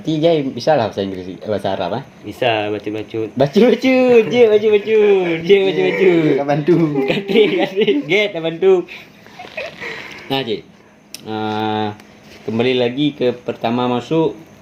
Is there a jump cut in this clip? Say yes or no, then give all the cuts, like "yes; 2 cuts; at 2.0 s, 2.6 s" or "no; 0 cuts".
no; 0 cuts